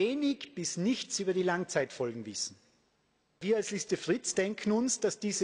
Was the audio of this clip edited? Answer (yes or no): yes